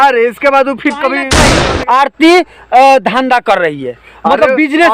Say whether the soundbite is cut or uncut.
cut